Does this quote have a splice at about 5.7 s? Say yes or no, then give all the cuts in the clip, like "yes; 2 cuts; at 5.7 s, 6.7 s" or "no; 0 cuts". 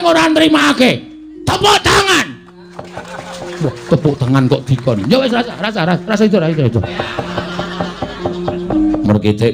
no; 1 cut; at 8.6 s